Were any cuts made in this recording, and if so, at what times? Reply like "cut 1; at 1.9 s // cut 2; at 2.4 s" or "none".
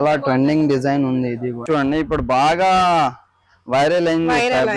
cut 1; at 1.6 s